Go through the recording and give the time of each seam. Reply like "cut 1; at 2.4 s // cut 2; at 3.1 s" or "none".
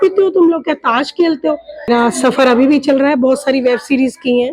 cut 1; at 1.9 s